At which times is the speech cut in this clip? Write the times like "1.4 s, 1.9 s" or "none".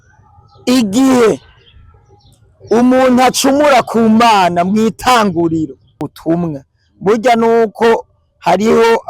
6.1 s